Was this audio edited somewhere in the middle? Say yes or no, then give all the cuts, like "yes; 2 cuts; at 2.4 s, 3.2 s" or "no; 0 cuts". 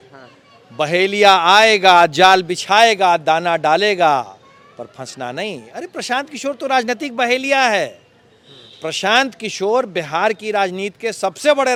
no; 0 cuts